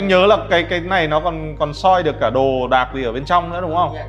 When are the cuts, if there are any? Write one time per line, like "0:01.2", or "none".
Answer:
none